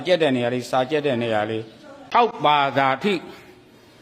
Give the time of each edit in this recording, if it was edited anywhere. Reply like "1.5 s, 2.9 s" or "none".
2.3 s